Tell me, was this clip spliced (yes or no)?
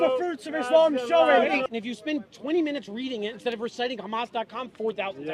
yes